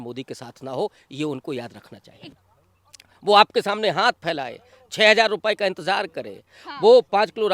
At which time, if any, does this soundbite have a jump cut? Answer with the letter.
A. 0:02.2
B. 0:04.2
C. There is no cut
A